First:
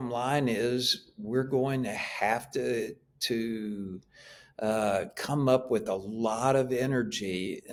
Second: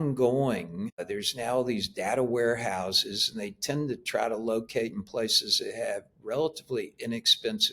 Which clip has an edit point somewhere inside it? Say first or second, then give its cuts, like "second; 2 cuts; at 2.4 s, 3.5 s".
second; 1 cut; at 1.0 s